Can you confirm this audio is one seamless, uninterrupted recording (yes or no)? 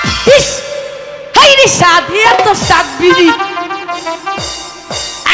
yes